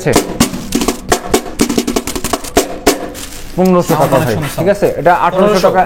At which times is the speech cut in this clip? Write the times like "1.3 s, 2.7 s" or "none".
none